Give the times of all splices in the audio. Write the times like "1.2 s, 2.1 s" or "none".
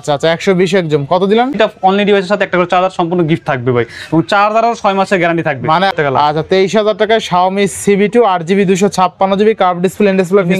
1.5 s, 5.9 s